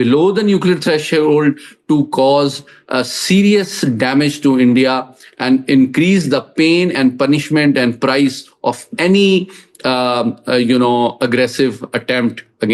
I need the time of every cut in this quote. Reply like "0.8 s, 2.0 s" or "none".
none

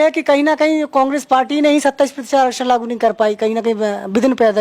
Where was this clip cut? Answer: none

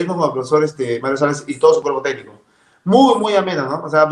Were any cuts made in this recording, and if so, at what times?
none

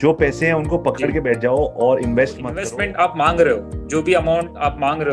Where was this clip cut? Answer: 2.6 s

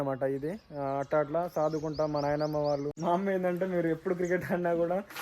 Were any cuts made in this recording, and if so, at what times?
3.0 s

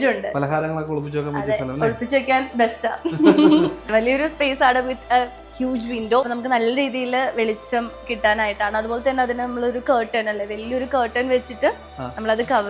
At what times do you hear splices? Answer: 3.9 s, 6.2 s

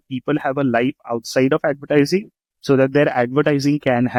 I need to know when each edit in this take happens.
none

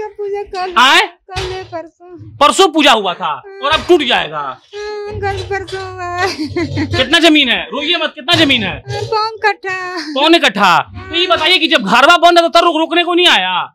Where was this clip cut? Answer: none

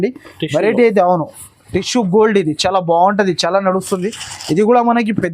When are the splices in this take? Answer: none

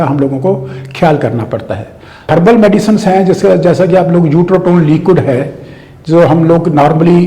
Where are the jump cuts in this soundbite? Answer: 2.3 s

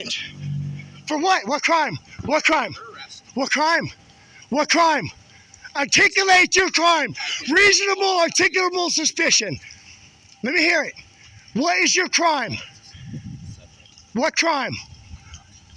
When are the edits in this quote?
none

